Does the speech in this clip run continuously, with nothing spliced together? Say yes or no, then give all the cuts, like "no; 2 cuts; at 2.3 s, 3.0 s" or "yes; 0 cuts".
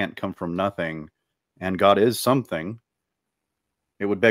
yes; 0 cuts